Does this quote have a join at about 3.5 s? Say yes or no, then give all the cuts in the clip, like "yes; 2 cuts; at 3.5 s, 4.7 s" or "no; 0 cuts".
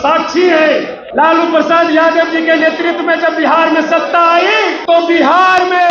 no; 2 cuts; at 1.0 s, 4.8 s